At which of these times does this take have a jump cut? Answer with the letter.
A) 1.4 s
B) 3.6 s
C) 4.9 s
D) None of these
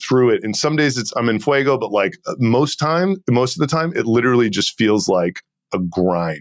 D